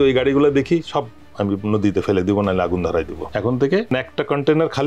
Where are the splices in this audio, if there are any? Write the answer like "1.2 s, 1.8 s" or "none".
3.2 s, 3.9 s

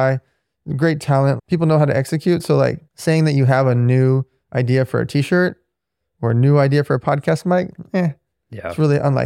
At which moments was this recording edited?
1.4 s, 2.9 s

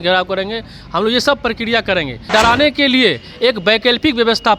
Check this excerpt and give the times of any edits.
2.2 s

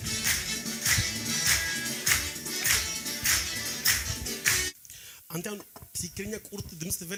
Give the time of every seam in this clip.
none

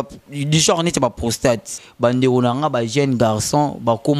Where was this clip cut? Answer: 1.8 s

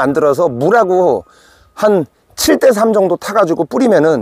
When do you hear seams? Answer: none

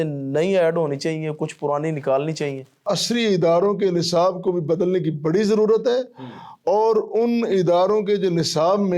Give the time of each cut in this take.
2.8 s

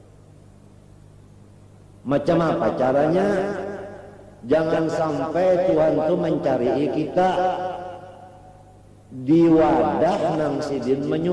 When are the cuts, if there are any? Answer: none

